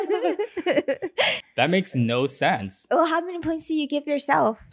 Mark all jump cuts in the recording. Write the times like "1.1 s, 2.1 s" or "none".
1.4 s